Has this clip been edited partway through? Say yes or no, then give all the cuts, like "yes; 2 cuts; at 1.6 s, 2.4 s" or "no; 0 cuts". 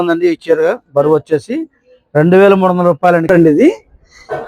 yes; 1 cut; at 3.3 s